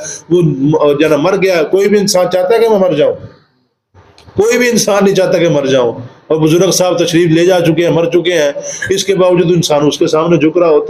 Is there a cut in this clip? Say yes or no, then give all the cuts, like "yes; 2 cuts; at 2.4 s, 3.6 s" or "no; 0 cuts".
no; 0 cuts